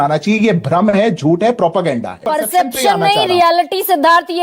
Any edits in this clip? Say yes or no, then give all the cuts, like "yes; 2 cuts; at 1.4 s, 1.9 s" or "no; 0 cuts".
yes; 1 cut; at 2.2 s